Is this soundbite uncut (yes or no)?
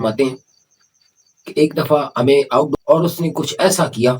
no